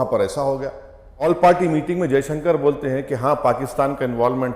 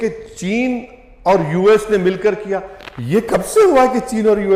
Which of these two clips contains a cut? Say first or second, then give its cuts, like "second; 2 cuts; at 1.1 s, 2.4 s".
first; 1 cut; at 1.1 s